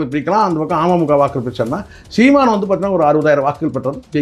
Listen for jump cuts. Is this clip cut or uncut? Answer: uncut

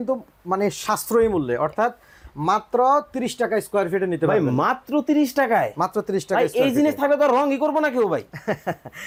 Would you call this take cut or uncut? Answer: uncut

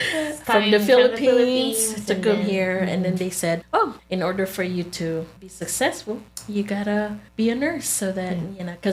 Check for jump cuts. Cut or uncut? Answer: cut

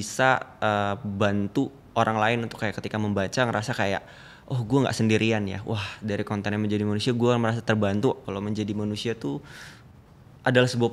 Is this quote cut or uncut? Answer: cut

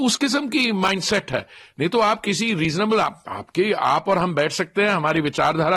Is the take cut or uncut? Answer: uncut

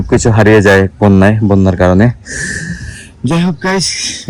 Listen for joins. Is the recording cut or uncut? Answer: uncut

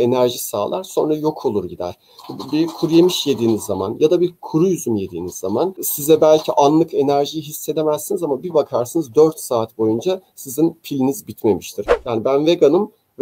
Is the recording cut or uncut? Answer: cut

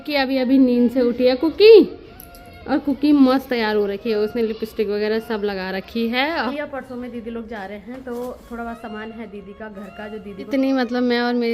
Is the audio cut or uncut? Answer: cut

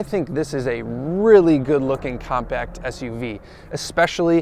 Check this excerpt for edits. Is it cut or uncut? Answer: uncut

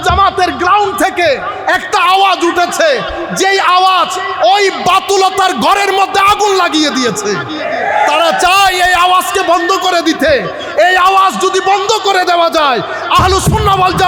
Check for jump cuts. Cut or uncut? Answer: uncut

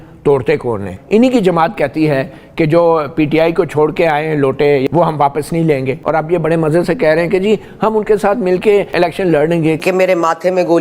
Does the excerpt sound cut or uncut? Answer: cut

